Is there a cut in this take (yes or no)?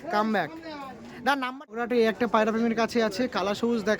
yes